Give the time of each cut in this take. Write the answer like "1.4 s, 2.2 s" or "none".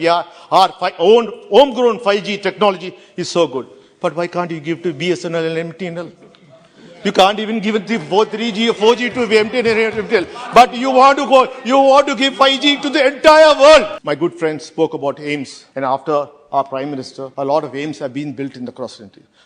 14.0 s, 15.6 s, 17.2 s